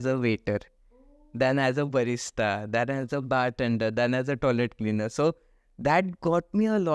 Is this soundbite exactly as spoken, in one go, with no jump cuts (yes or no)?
yes